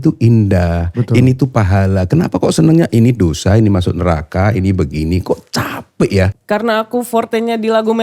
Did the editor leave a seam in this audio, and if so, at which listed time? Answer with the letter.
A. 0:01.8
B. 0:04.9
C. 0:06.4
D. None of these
C